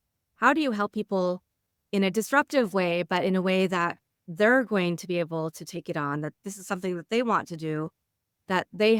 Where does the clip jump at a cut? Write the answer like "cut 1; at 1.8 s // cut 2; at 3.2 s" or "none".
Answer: none